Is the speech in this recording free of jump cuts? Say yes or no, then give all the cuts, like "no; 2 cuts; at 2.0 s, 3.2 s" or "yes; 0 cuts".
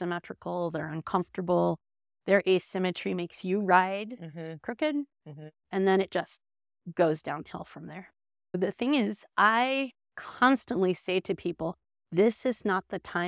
no; 1 cut; at 8.6 s